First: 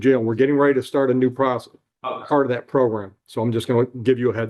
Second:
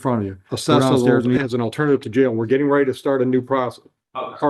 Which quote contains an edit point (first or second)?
second